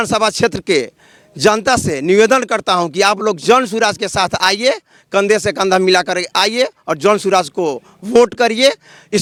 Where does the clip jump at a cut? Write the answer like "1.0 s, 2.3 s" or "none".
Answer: none